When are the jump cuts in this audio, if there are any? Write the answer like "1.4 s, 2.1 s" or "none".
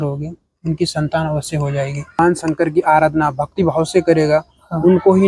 2.2 s